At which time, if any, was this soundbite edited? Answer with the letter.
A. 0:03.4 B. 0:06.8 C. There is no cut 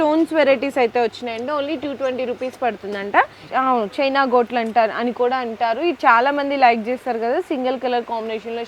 A